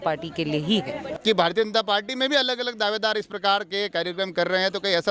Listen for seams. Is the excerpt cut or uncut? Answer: cut